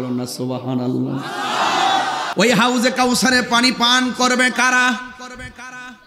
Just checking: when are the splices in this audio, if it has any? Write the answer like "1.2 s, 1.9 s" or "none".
2.3 s

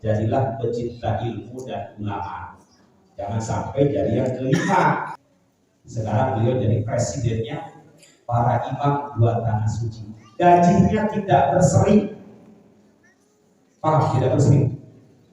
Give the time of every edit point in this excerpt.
5.2 s

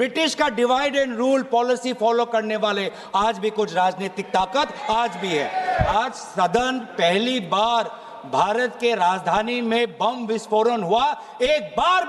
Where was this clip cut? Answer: 5.9 s

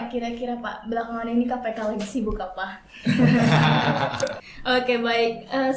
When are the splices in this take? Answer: 4.4 s

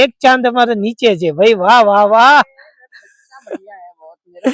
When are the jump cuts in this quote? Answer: none

